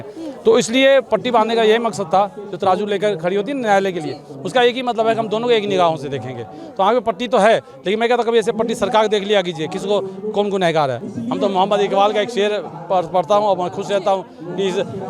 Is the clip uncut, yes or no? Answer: no